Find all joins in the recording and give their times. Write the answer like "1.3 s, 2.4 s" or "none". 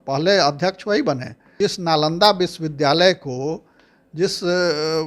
1.5 s